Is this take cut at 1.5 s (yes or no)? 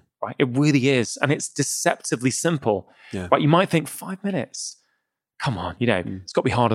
yes